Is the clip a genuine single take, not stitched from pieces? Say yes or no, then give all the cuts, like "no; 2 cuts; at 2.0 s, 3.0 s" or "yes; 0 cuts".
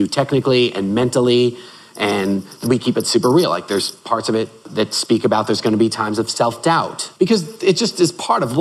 no; 3 cuts; at 2.6 s, 4.6 s, 7.1 s